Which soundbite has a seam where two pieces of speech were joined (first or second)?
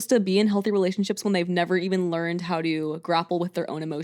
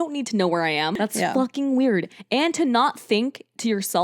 second